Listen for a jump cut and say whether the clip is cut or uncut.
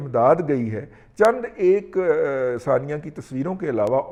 uncut